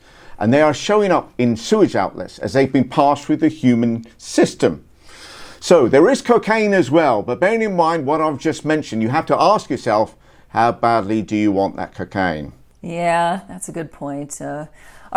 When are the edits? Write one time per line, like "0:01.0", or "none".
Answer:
none

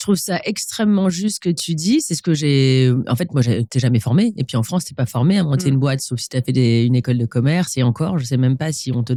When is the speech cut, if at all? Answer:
none

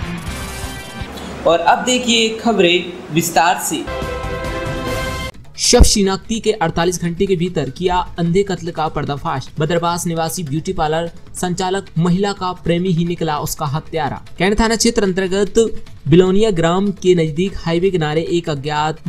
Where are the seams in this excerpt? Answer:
none

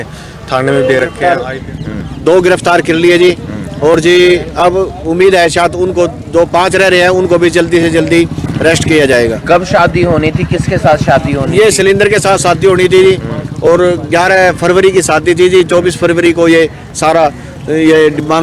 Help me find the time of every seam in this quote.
0:01.2

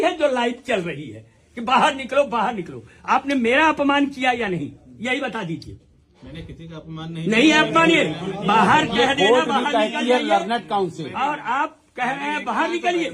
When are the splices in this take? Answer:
none

